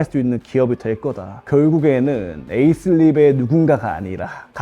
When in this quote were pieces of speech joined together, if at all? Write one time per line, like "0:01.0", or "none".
0:01.3